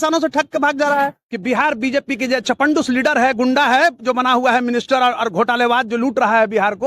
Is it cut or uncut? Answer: cut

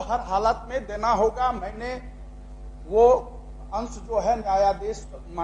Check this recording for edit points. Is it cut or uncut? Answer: uncut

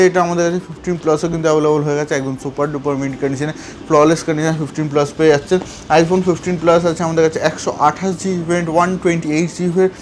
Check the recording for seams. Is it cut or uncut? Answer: uncut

